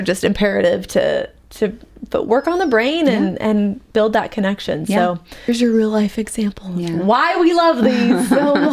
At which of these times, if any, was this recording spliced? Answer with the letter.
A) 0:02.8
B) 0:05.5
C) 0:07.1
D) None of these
B